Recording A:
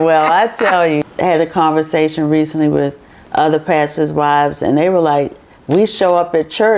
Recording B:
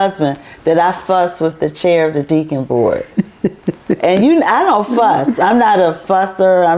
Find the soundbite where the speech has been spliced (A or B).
A